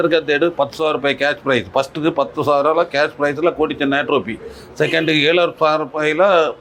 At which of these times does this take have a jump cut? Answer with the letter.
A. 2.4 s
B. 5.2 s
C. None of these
C